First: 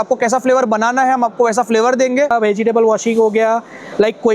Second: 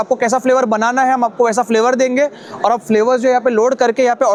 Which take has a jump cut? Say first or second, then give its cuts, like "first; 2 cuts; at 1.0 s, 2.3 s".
first; 1 cut; at 2.3 s